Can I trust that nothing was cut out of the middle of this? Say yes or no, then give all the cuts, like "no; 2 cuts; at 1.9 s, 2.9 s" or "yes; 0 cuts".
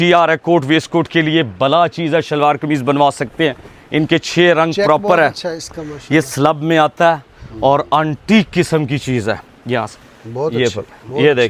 yes; 0 cuts